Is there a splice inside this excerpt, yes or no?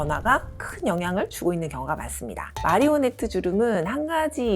yes